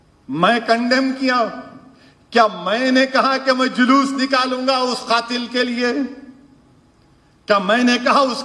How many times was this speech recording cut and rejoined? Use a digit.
0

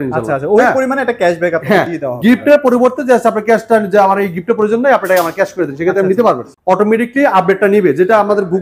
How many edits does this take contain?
1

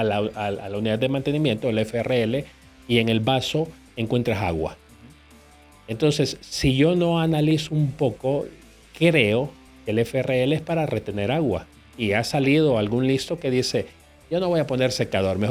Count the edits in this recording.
0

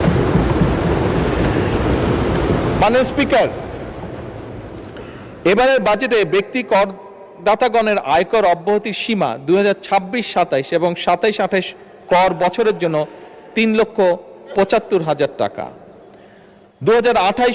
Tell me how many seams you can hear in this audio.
0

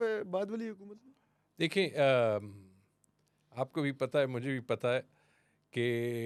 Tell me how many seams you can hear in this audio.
0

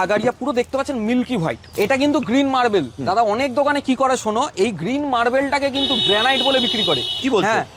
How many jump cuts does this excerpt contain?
1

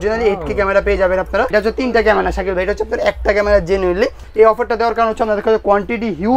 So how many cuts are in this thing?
2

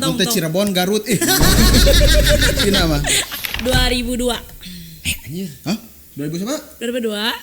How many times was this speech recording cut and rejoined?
1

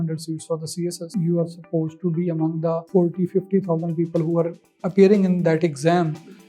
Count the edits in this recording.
2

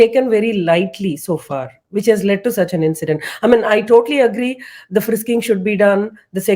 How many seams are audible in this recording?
0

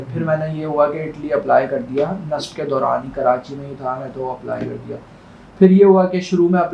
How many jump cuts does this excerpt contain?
0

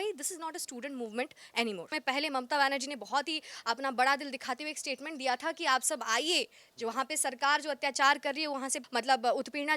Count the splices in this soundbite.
2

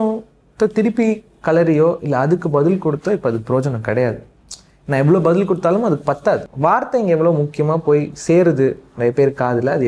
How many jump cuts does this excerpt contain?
1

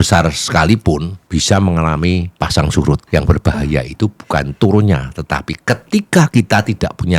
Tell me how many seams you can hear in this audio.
3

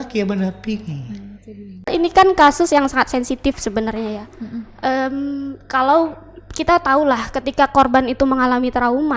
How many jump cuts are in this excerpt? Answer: 1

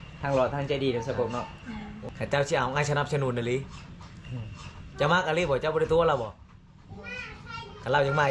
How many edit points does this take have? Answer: 1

